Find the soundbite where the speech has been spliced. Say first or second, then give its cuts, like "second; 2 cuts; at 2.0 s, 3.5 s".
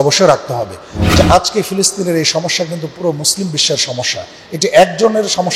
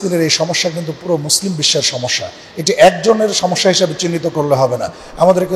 first; 1 cut; at 1.0 s